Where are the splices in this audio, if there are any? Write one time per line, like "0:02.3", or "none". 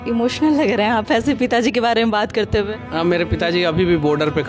none